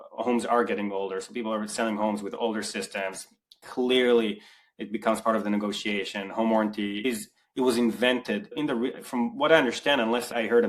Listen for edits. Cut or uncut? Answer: uncut